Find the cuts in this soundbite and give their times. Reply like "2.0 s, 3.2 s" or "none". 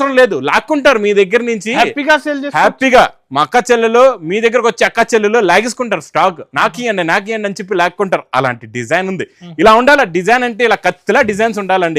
none